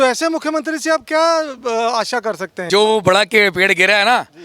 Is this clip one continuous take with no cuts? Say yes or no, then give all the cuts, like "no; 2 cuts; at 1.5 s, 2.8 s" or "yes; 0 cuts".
no; 1 cut; at 2.5 s